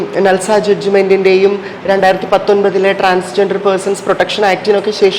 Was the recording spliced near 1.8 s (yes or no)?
no